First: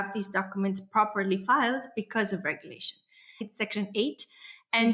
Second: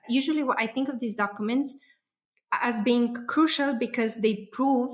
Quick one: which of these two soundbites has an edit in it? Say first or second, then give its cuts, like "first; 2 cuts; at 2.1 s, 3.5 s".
first; 1 cut; at 3.4 s